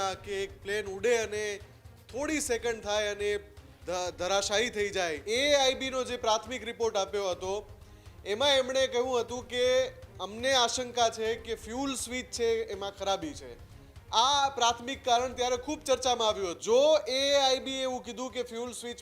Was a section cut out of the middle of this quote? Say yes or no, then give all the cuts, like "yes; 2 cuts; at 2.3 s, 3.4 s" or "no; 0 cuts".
yes; 2 cuts; at 5.2 s, 16.6 s